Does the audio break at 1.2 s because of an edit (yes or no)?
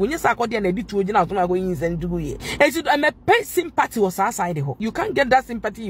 no